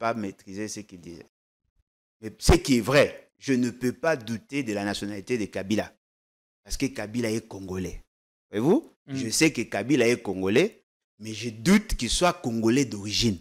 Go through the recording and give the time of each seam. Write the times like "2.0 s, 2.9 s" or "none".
1.2 s